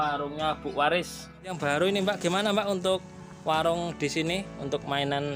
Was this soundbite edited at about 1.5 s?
yes; 1 cut; at 1.5 s

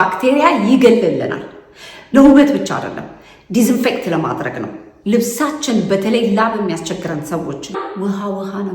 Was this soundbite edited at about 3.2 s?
no; 2 cuts; at 1.9 s, 7.8 s

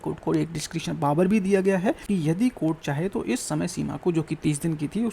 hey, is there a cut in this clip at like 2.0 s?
yes; 1 cut; at 2.0 s

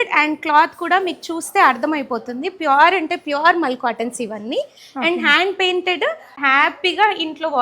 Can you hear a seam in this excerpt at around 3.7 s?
no; 1 cut; at 6.3 s

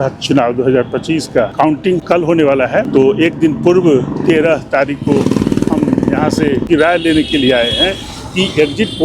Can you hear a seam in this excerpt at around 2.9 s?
yes; 3 cuts; at 1.7 s, 2.9 s, 6.7 s

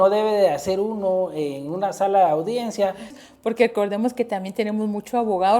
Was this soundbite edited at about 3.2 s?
yes; 1 cut; at 3.2 s

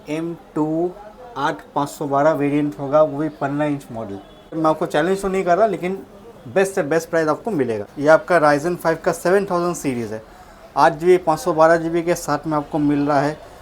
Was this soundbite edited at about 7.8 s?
yes; 2 cuts; at 4.6 s, 7.8 s

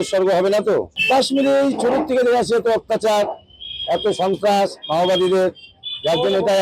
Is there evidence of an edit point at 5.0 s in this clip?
no; 1 cut; at 1.0 s

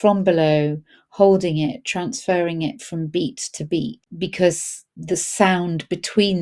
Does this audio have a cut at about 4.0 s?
yes; 2 cuts; at 4.0 s, 4.9 s

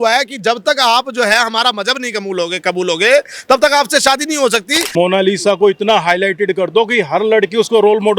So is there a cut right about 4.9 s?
yes; 1 cut; at 4.9 s

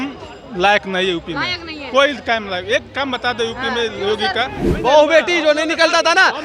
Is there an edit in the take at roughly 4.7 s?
yes; 1 cut; at 4.7 s

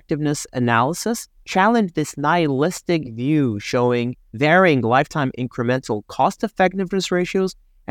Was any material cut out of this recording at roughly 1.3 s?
yes; 2 cuts; at 1.3 s, 4.2 s

